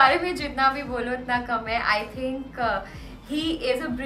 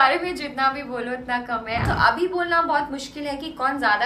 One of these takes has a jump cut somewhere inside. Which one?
second; 1 cut; at 1.8 s

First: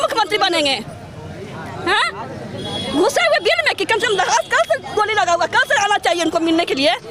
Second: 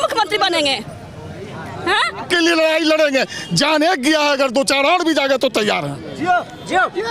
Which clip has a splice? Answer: second; 1 cut; at 2.2 s

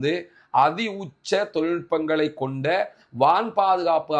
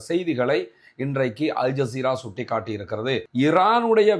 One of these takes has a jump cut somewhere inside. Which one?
second; 1 cut; at 3.3 s

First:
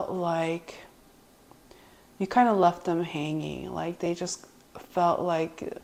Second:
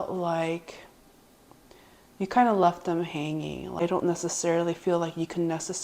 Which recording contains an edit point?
second; 1 cut; at 3.8 s

